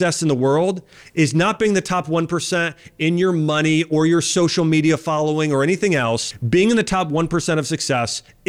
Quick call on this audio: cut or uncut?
cut